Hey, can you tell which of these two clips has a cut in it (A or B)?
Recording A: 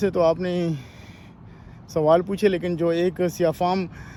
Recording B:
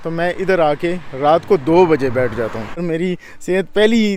B